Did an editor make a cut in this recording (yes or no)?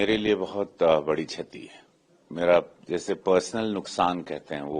no